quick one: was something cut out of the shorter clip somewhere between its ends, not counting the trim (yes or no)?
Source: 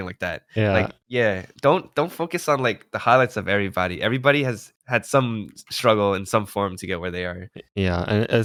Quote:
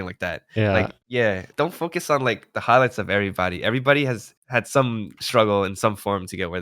yes